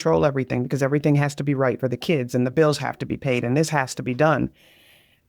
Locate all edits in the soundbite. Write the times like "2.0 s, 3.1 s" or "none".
none